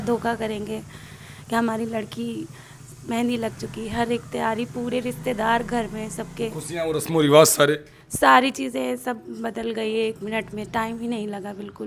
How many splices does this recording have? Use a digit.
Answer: 0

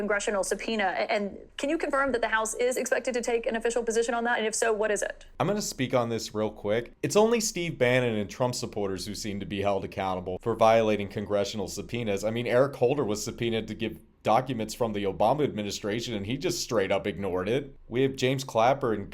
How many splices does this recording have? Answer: 1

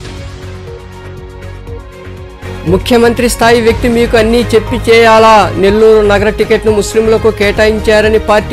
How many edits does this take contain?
1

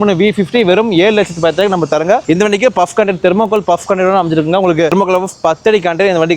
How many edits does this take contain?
2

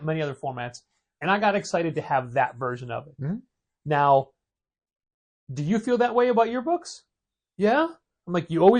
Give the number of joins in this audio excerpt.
0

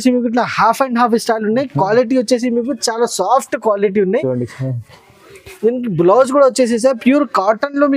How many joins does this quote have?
0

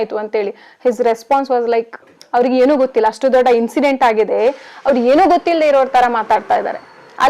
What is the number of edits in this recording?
0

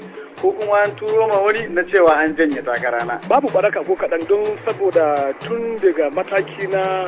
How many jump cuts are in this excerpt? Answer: 1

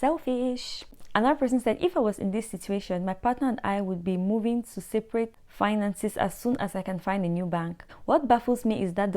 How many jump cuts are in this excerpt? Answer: 3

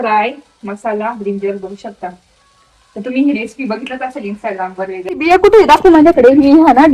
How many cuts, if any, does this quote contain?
1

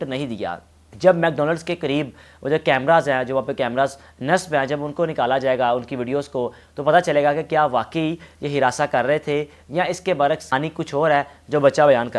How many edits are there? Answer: 2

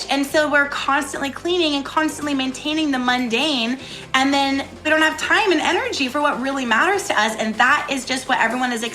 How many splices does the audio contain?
1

